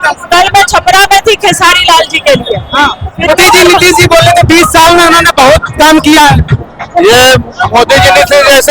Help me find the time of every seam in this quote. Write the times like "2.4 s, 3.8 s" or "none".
3.3 s